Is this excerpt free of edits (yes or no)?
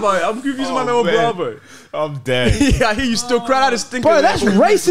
yes